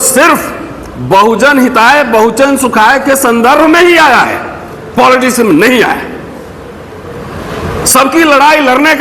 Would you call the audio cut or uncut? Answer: uncut